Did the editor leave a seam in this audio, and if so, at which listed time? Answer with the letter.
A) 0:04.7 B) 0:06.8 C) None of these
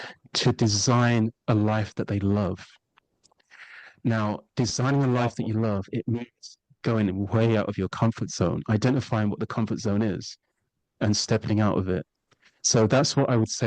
C